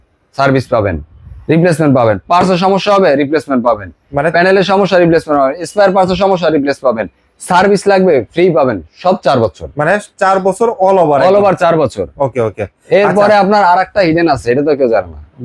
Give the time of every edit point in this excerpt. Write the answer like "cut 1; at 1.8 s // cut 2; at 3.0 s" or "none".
none